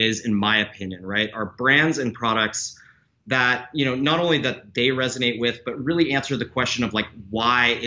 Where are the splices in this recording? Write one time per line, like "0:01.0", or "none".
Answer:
none